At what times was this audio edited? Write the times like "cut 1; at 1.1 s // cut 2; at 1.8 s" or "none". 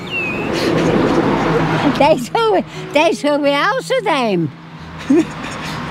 none